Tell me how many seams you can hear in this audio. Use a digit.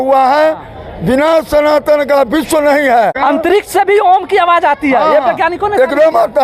1